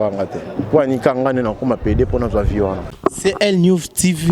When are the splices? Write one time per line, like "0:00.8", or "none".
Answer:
0:02.9